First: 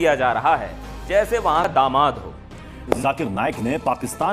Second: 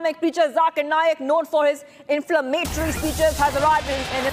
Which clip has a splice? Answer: first; 1 cut; at 3.0 s

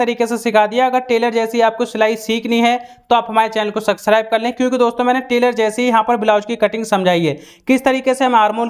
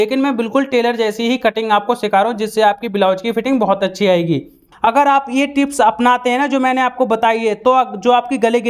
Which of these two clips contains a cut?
second; 1 cut; at 4.7 s

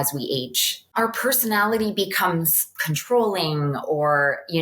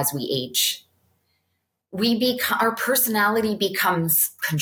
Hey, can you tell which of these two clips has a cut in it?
first; 1 cut; at 0.9 s

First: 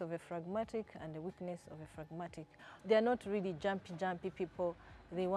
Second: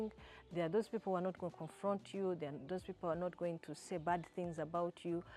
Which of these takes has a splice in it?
first; 1 cut; at 2.7 s

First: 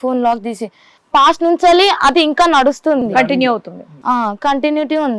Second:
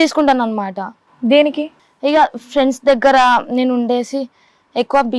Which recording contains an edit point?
first; 1 cut; at 1.0 s

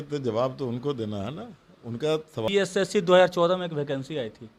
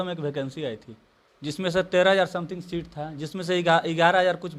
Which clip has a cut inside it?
first; 1 cut; at 2.5 s

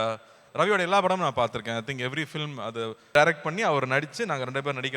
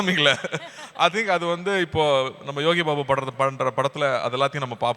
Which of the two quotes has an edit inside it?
first; 1 cut; at 3.1 s

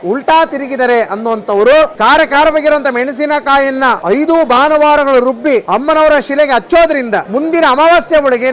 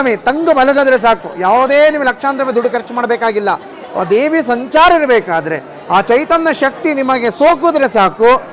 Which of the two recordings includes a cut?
first; 4 cuts; at 1.9 s, 4.0 s, 5.6 s, 7.3 s

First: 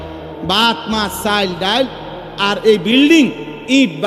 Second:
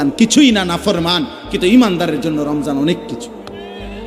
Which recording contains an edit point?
second; 1 cut; at 3.2 s

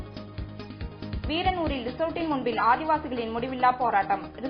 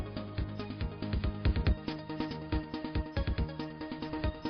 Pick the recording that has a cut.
first; 1 cut; at 1.3 s

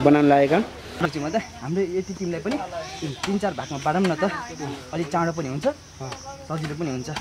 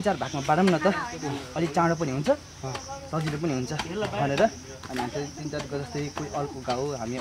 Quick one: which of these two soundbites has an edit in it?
first; 1 cut; at 1.0 s

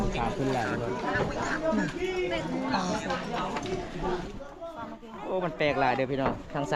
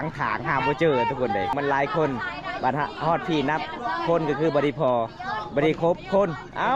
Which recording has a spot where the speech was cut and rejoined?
second; 1 cut; at 1.5 s

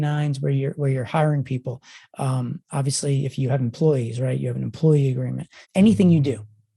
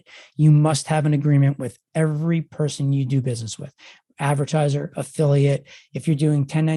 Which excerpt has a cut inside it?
first; 1 cut; at 5.5 s

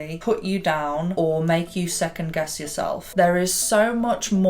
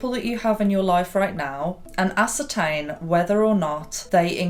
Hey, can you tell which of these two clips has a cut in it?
first; 2 cuts; at 1.1 s, 3.1 s

